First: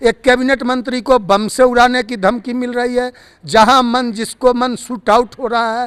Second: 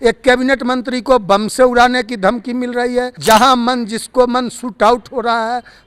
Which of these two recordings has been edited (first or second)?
second